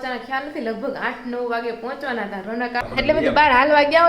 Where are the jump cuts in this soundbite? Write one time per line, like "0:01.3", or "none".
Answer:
0:02.8